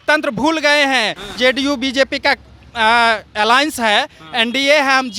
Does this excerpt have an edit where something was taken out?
yes; 1 cut; at 1.3 s

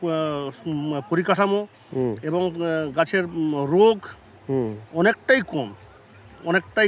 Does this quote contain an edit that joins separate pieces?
no; 0 cuts

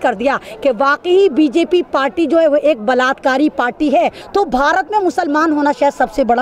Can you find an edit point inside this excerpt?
yes; 1 cut; at 4.2 s

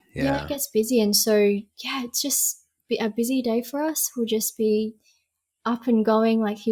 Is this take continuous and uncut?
yes; 0 cuts

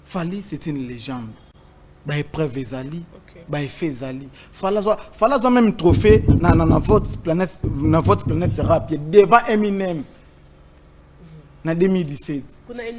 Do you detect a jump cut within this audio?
no; 0 cuts

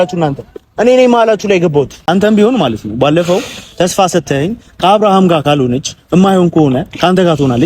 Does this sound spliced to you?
yes; 1 cut; at 2.0 s

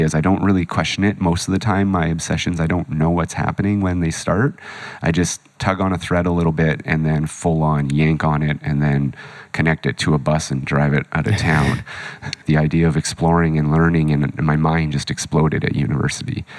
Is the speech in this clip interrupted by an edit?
yes; 2 cuts; at 5.5 s, 12.4 s

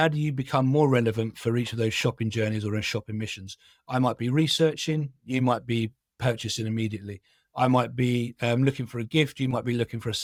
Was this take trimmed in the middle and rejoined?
no; 0 cuts

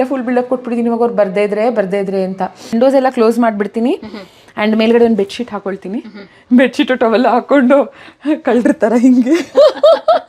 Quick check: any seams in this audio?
yes; 1 cut; at 2.6 s

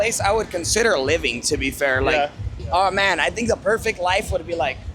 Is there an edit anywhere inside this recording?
yes; 1 cut; at 2.5 s

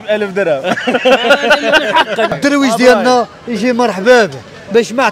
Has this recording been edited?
yes; 1 cut; at 2.3 s

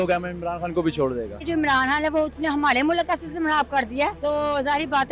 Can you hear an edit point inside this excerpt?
yes; 2 cuts; at 1.4 s, 4.2 s

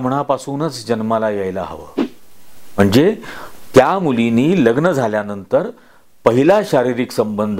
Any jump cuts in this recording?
no; 0 cuts

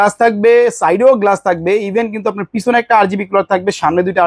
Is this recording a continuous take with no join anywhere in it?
yes; 0 cuts

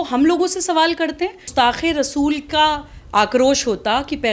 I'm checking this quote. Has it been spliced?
yes; 1 cut; at 1.5 s

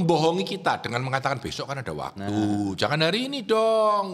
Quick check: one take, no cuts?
yes; 0 cuts

